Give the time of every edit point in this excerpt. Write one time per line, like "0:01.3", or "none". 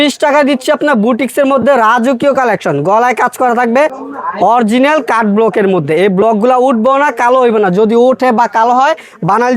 0:04.0